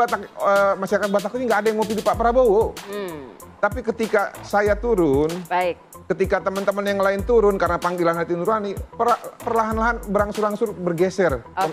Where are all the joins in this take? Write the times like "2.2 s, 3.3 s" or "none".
none